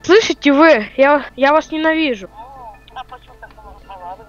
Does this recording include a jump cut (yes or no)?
yes